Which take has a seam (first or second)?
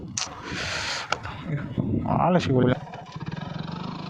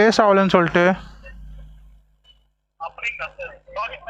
first